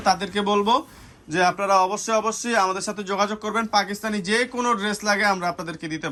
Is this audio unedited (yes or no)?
yes